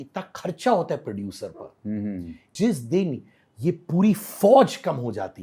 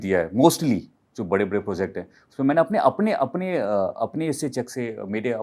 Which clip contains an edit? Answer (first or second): first